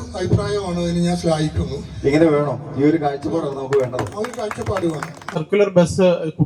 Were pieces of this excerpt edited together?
yes; 1 cut; at 5.4 s

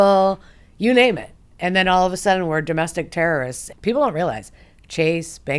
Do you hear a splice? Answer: yes; 1 cut; at 3.6 s

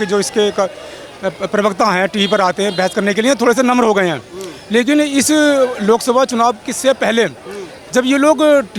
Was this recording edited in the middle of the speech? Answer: no; 0 cuts

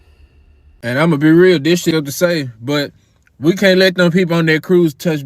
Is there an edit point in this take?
yes; 2 cuts; at 0.8 s, 1.9 s

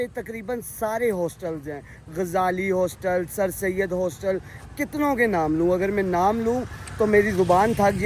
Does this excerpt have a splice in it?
no; 0 cuts

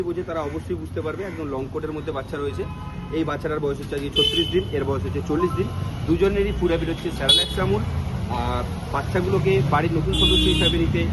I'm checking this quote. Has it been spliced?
no; 0 cuts

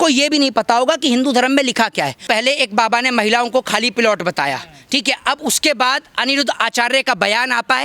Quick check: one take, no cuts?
no; 1 cut; at 2.2 s

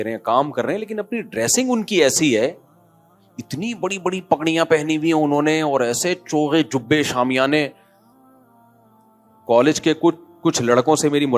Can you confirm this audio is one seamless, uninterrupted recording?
yes; 0 cuts

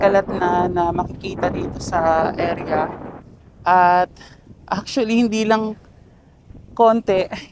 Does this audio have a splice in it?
no; 0 cuts

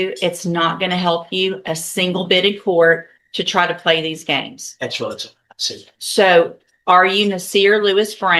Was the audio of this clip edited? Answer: no; 0 cuts

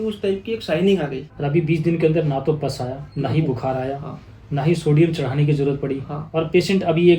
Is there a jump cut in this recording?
yes; 3 cuts; at 1.3 s, 3.0 s, 6.2 s

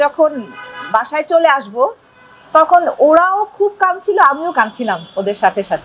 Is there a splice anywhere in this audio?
no; 0 cuts

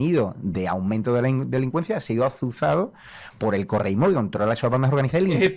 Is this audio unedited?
yes; 0 cuts

